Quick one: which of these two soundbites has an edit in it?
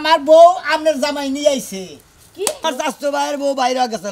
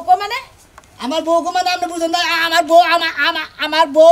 first; 1 cut; at 2.6 s

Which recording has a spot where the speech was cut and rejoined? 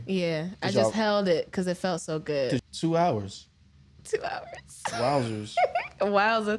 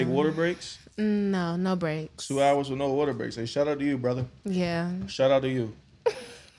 first; 1 cut; at 2.6 s

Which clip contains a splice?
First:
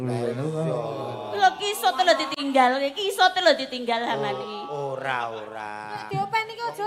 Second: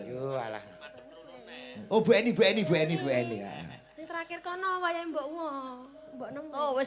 first; 1 cut; at 6.0 s

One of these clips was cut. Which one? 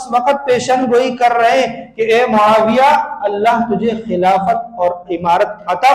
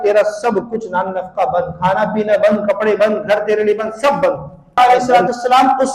second; 1 cut; at 4.8 s

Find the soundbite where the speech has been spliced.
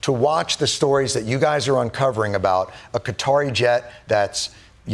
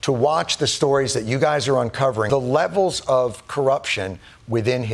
second; 1 cut; at 2.3 s

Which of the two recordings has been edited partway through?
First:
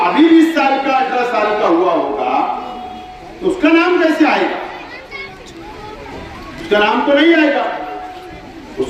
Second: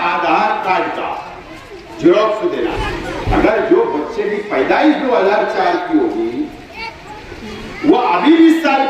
second; 1 cut; at 2.8 s

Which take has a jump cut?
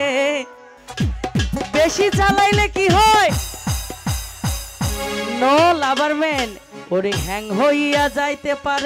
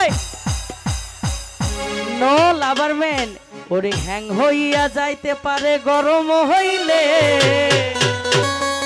first; 1 cut; at 0.9 s

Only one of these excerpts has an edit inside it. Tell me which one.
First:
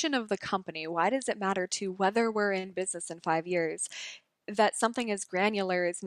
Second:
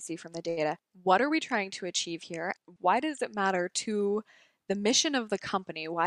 second; 2 cuts; at 0.9 s, 2.6 s

